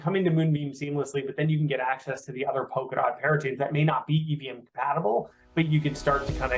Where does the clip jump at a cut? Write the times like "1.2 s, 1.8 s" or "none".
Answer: none